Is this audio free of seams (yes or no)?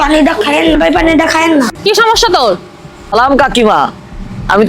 no